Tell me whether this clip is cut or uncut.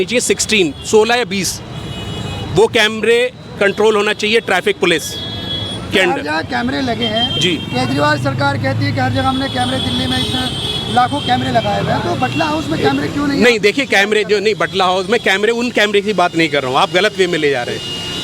uncut